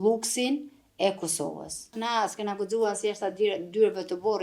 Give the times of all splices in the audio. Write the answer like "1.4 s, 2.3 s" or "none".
2.0 s